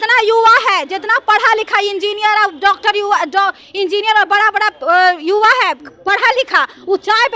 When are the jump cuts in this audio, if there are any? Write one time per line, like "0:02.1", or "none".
none

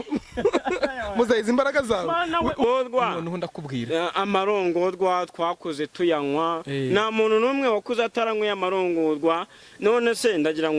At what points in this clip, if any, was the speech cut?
0:02.6

